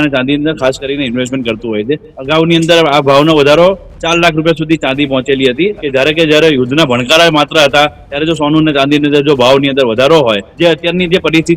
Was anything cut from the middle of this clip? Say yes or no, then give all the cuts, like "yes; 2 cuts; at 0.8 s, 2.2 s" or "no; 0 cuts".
yes; 3 cuts; at 2.1 s, 5.8 s, 10.5 s